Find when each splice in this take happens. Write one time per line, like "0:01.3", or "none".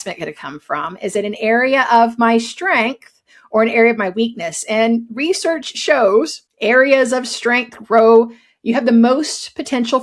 0:06.4